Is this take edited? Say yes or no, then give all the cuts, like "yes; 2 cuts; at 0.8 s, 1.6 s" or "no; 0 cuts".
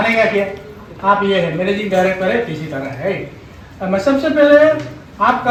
no; 0 cuts